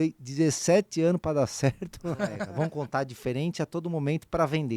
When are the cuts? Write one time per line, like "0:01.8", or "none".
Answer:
0:02.4